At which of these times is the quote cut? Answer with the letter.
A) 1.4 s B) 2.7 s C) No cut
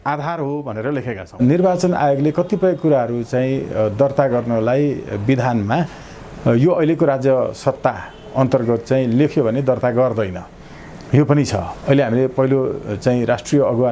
A